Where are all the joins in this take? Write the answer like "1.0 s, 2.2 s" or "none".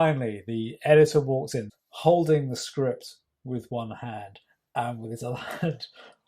1.6 s